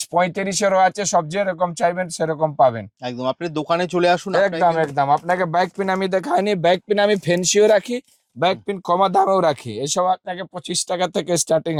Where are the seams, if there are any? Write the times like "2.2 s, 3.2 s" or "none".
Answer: none